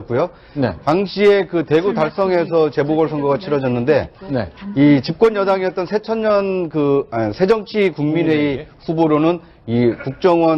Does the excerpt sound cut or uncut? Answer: cut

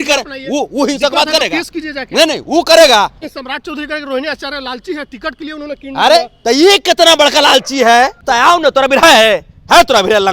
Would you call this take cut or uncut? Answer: cut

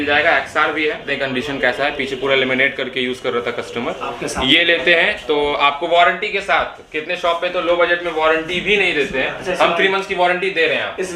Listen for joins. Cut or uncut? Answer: cut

